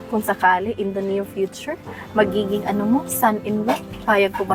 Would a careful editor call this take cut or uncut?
uncut